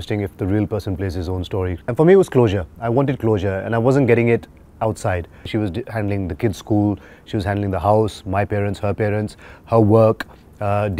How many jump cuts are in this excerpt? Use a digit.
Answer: 2